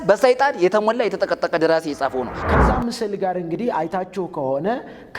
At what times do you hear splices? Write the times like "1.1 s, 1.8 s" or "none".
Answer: 2.4 s

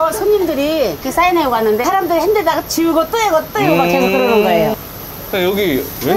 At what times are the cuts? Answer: 1.0 s, 1.8 s, 4.8 s

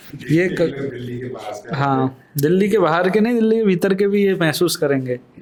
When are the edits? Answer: none

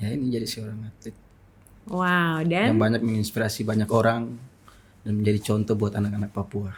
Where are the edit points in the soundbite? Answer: none

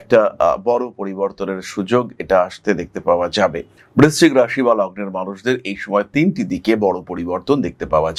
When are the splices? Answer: none

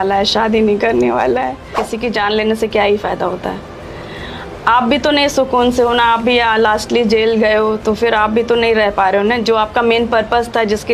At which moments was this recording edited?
1.8 s

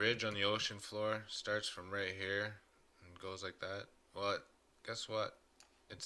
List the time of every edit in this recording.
1.3 s

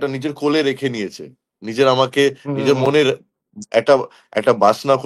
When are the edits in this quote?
none

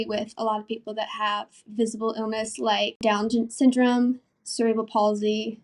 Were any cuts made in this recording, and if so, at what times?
none

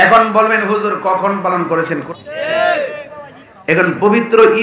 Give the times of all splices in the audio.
2.0 s

